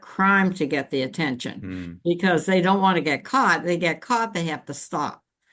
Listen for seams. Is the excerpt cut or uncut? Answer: uncut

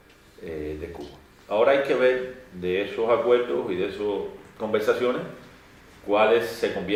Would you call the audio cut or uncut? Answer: uncut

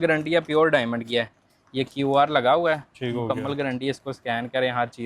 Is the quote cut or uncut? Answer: uncut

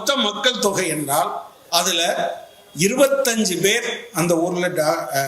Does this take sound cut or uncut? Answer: cut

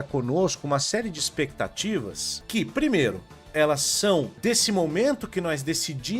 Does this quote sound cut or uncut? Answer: cut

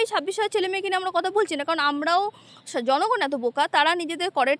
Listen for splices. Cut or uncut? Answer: uncut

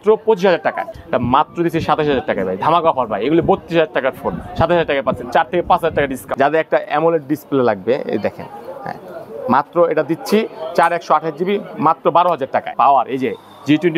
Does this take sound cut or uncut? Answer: cut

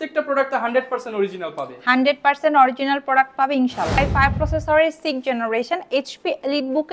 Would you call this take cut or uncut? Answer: cut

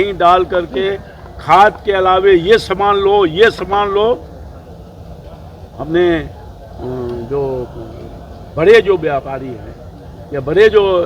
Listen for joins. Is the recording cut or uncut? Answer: uncut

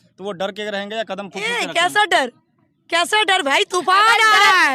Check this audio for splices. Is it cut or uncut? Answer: uncut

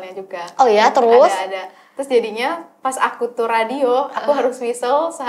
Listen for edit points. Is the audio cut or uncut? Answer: uncut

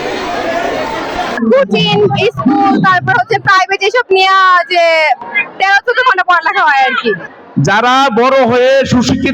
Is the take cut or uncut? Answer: cut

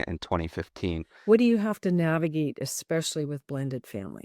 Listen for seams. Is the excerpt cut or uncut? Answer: cut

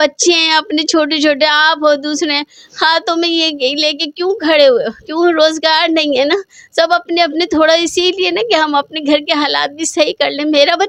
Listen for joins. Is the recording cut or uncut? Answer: uncut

